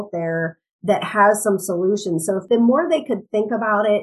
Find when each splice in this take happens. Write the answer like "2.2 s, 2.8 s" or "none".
2.4 s